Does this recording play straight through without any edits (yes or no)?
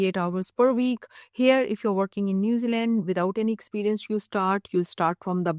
no